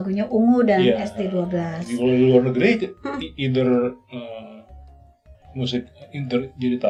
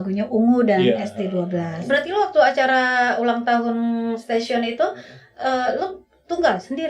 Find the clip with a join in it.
second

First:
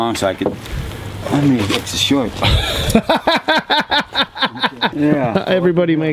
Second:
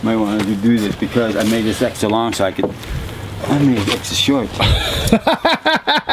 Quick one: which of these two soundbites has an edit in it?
first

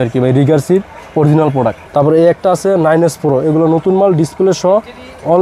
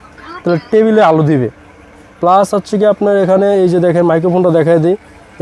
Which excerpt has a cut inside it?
first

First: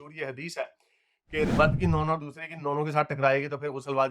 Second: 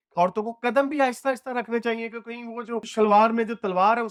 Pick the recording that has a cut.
first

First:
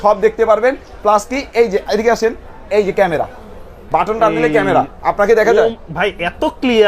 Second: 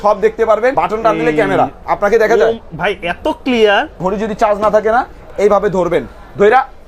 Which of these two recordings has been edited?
second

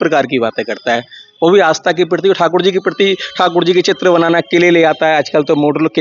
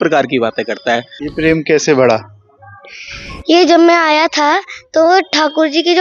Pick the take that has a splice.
second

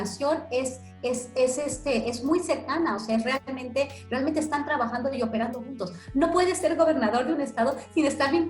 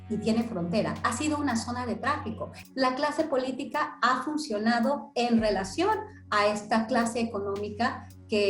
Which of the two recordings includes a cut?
second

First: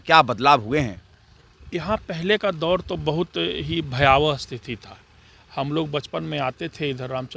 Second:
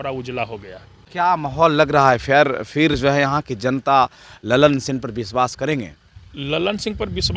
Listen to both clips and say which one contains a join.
second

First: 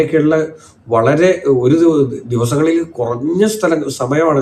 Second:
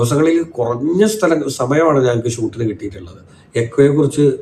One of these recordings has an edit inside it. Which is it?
second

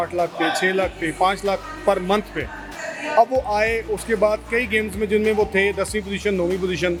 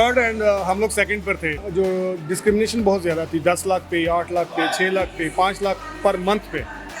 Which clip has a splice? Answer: second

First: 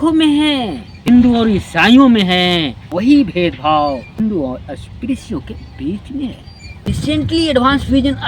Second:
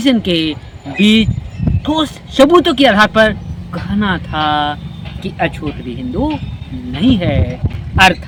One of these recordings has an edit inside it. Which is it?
first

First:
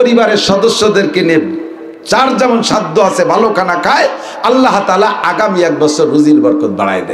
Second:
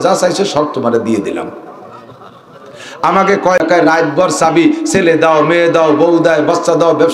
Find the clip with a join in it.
second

